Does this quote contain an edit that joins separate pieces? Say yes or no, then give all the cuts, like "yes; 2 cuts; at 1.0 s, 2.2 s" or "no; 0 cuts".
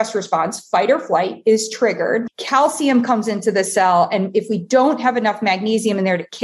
yes; 1 cut; at 2.4 s